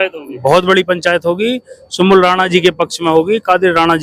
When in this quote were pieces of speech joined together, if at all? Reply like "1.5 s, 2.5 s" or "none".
none